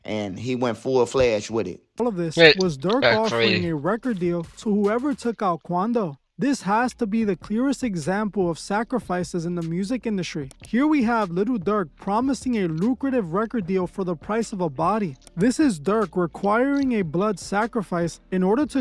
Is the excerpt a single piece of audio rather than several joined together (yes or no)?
no